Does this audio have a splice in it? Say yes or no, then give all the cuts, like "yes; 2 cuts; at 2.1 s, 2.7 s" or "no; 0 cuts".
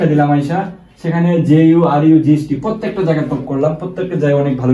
no; 0 cuts